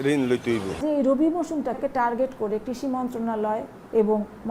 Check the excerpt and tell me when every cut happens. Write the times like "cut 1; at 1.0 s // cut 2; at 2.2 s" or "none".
cut 1; at 0.8 s // cut 2; at 1.8 s